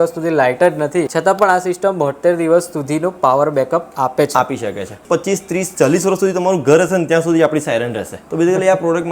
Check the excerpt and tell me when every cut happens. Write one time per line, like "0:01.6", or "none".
0:01.1
0:05.0
0:08.2